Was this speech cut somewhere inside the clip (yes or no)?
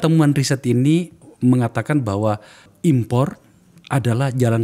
yes